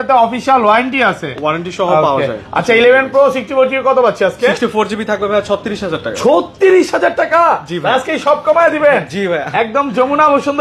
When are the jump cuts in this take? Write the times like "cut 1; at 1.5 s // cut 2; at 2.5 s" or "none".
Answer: none